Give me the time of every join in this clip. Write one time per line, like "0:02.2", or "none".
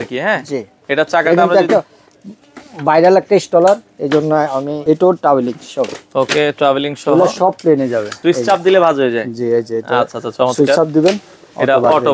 0:04.8
0:08.2